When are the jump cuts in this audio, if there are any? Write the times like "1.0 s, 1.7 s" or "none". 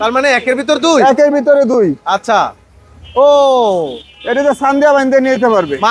none

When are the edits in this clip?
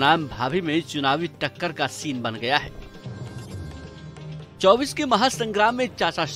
2.7 s, 4.6 s

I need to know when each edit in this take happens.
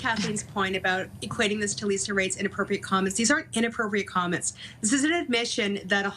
none

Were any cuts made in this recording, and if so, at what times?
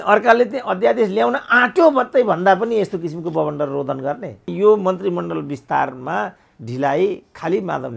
4.5 s

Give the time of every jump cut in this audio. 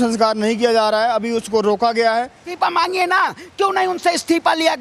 2.4 s

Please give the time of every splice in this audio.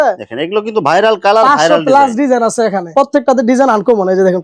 2.8 s

